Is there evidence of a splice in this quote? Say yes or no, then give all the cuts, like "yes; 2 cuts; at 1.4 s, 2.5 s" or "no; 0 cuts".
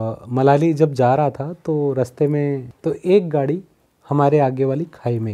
yes; 1 cut; at 2.7 s